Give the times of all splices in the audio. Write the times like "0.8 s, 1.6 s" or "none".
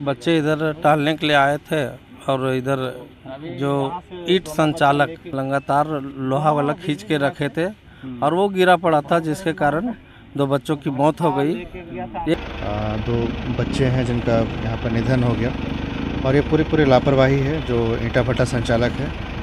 5.2 s, 12.3 s